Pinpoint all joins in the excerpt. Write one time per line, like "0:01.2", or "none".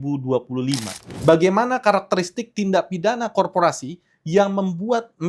0:01.2